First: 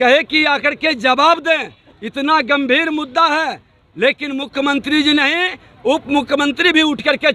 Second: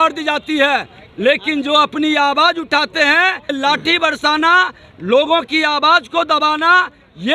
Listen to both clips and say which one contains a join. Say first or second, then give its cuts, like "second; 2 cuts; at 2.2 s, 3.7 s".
second; 1 cut; at 3.5 s